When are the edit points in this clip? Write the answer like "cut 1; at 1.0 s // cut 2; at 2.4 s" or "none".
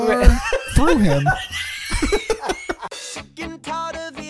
cut 1; at 2.8 s

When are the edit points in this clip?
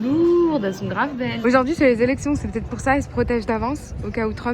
cut 1; at 1.3 s

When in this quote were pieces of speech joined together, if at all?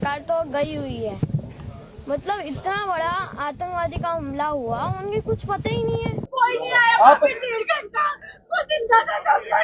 cut 1; at 6.2 s

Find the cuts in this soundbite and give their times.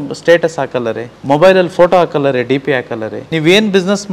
cut 1; at 1.1 s // cut 2; at 3.2 s

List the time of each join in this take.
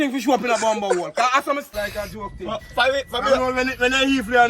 cut 1; at 1.7 s

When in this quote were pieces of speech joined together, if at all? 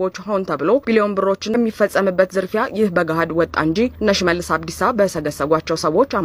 cut 1; at 1.6 s

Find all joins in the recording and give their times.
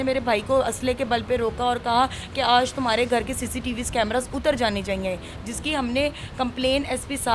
none

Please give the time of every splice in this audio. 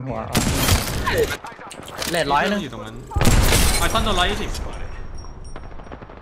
cut 1; at 1.4 s

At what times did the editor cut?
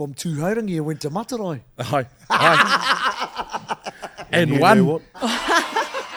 none

